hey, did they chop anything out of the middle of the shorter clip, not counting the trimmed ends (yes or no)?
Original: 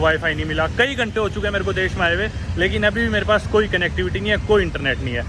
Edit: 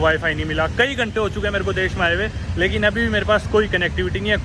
no